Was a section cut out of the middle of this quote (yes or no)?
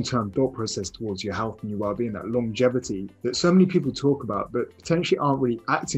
yes